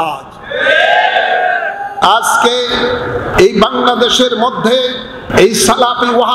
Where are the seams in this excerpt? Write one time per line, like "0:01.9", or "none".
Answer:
0:01.9
0:03.3
0:05.2

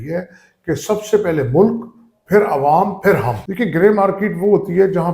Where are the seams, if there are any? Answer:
0:03.4

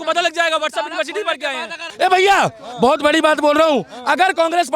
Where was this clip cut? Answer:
0:01.9

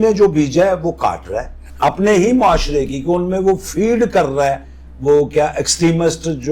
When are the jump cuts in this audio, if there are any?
0:01.6

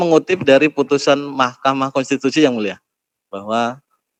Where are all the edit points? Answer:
none

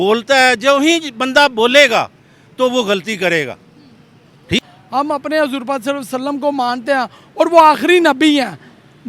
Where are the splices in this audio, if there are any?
0:04.6

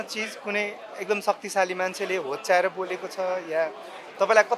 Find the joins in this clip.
none

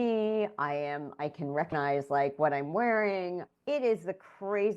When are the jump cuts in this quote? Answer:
0:01.7
0:03.5

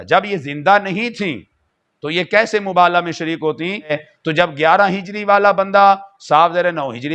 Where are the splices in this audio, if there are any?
0:04.0

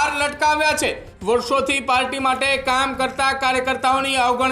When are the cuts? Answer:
0:01.1

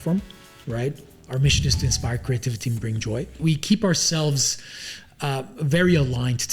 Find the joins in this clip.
0:01.1
0:03.4

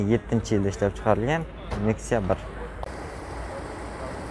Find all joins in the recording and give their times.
0:02.8

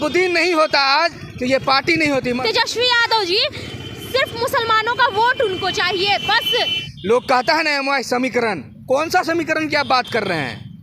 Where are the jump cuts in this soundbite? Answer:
0:02.4
0:06.9

